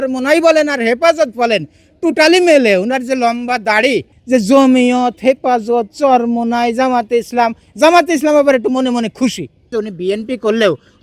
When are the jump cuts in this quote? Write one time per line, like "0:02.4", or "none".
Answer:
0:04.1
0:09.7